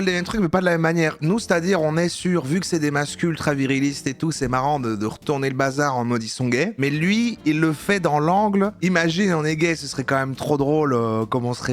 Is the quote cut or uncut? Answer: cut